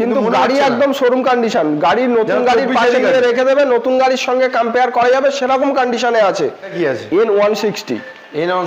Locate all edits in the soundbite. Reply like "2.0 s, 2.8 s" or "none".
6.7 s